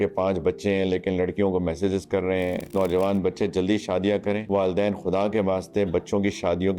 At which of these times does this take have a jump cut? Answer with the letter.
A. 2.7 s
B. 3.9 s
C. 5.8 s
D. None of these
A